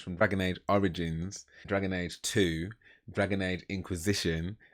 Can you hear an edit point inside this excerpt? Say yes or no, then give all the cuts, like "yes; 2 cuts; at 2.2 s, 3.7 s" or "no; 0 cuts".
no; 0 cuts